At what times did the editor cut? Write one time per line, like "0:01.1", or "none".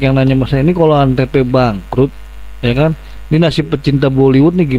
none